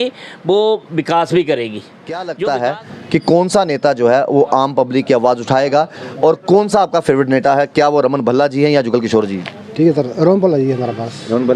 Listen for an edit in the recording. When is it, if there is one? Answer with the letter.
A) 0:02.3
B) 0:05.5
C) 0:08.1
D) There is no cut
A